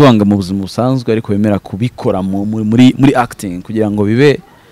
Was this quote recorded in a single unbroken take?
yes; 0 cuts

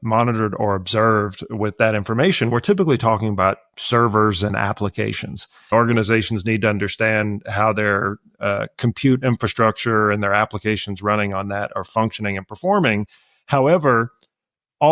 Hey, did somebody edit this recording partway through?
yes; 1 cut; at 5.7 s

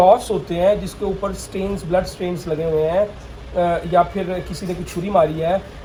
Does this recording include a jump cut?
no; 0 cuts

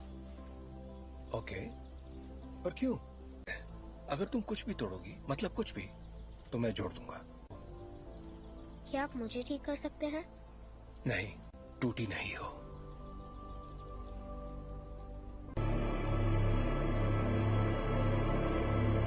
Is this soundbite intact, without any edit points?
yes; 0 cuts

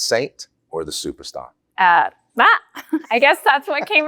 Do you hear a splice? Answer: yes; 1 cut; at 1.7 s

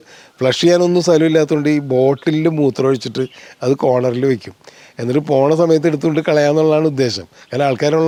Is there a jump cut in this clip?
no; 0 cuts

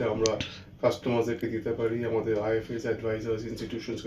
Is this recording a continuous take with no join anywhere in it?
yes; 0 cuts

